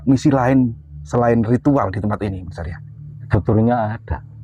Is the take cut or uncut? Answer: uncut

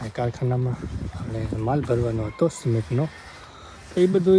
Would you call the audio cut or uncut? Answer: uncut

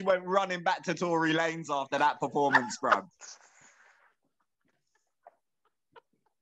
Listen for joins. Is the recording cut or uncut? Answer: uncut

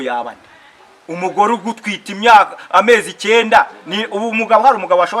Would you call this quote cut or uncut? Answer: uncut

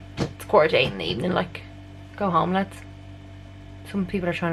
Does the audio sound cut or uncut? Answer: uncut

